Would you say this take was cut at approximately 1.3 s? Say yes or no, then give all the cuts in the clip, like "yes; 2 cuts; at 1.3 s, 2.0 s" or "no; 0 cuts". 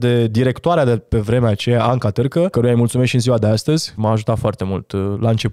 no; 2 cuts; at 2.5 s, 3.9 s